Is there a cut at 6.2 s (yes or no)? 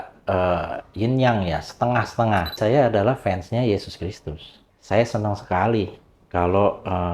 no